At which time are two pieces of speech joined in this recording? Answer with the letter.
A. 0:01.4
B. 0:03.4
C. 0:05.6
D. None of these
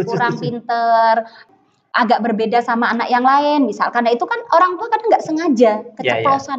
A